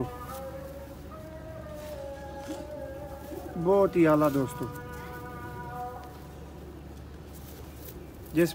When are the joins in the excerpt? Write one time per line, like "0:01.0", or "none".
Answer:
none